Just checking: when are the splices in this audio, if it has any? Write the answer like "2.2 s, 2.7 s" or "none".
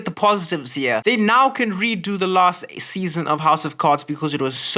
1.0 s